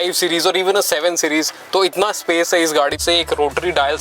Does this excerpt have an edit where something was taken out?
yes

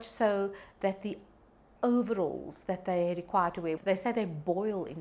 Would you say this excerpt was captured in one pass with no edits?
no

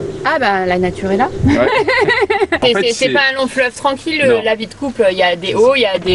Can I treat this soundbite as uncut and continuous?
no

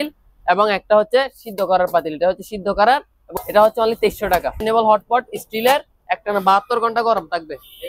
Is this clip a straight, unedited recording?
no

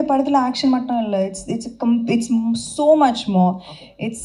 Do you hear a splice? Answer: no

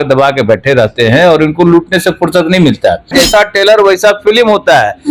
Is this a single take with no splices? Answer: no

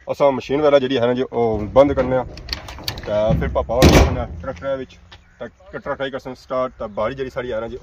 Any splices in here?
no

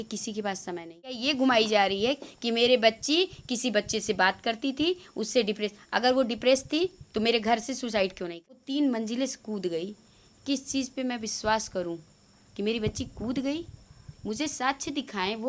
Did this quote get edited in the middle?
yes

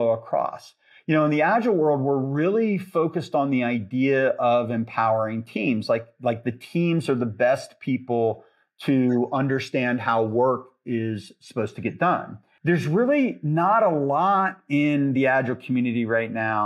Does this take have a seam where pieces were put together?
yes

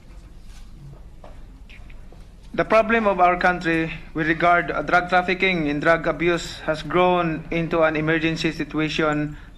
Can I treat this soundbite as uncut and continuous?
no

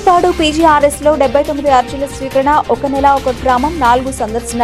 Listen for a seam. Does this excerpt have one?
no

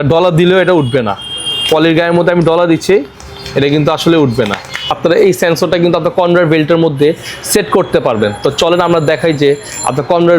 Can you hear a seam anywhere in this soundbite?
yes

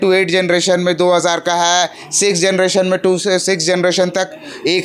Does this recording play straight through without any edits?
yes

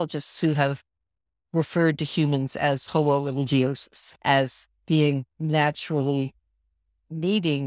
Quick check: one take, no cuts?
no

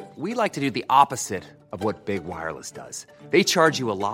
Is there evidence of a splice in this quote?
no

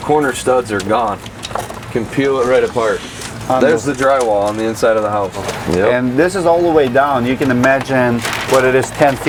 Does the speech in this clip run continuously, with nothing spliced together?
yes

